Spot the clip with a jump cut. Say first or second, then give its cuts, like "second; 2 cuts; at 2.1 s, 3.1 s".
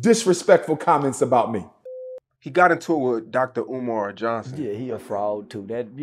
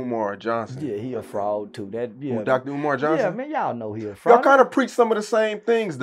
first; 1 cut; at 1.8 s